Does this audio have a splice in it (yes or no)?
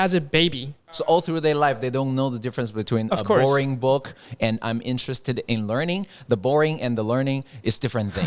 yes